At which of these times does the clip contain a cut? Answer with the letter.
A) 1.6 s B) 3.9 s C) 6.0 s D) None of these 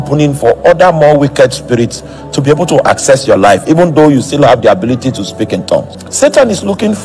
C